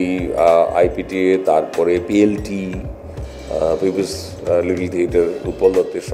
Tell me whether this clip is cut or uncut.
uncut